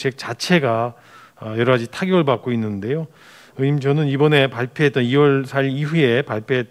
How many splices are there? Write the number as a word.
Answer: zero